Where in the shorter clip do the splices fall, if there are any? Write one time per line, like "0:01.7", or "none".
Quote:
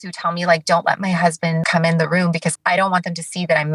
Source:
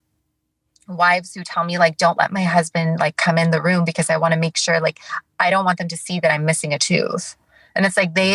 0:01.6
0:02.5